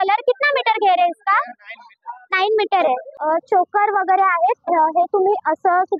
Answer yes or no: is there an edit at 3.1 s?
yes